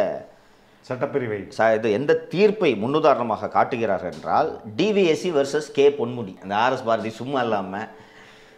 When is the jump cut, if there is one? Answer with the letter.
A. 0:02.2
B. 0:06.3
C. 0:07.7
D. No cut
B